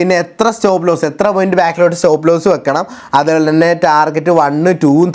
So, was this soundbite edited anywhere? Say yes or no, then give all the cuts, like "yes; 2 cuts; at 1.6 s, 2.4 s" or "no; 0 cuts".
no; 0 cuts